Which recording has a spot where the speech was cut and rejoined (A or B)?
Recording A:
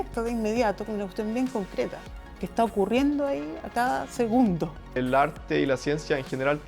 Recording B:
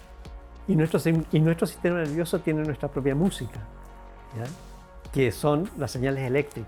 A